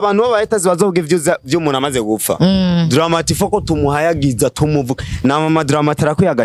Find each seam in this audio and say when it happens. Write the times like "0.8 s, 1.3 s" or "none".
none